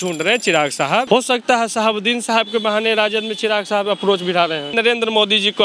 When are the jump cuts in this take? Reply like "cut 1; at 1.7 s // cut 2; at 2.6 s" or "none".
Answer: cut 1; at 1.1 s // cut 2; at 4.7 s